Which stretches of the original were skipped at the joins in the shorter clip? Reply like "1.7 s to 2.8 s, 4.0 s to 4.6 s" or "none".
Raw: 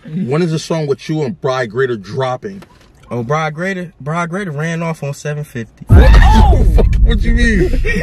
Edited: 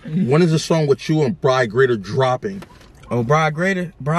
none